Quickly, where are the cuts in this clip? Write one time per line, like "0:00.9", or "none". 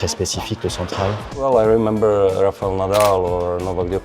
0:01.3